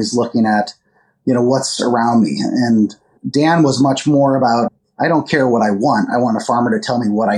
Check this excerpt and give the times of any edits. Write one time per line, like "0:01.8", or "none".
0:03.2
0:04.8